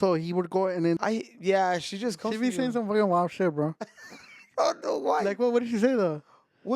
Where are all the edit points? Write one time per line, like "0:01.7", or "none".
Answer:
0:01.0